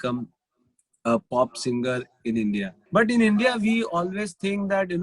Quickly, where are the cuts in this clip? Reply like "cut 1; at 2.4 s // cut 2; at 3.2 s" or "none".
cut 1; at 2.8 s